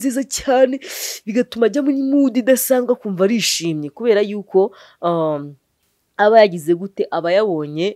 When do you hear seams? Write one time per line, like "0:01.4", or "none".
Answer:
none